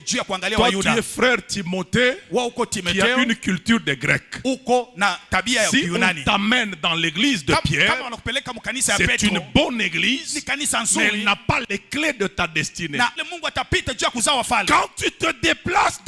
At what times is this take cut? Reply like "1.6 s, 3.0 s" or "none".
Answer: 13.2 s